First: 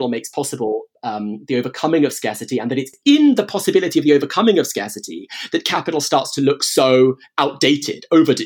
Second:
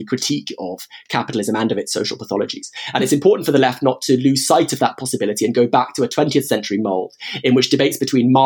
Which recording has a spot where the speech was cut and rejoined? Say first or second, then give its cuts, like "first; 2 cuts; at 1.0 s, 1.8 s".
first; 1 cut; at 2.9 s